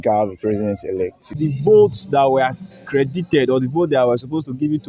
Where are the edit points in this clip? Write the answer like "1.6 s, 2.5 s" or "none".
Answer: 1.3 s